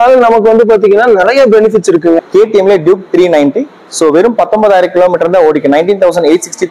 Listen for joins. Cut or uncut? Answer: cut